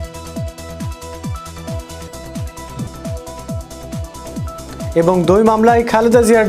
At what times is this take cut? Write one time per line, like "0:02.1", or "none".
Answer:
none